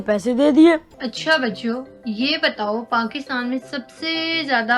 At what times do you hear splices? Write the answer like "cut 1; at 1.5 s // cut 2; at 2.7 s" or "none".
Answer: cut 1; at 0.9 s